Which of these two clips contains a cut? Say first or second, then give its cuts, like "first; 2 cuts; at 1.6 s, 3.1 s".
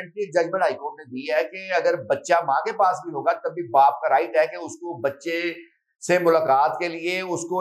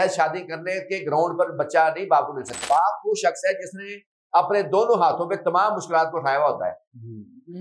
second; 1 cut; at 2.6 s